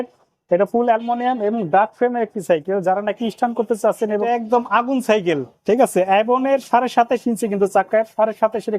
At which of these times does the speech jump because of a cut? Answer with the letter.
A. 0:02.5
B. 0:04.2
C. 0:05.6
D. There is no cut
B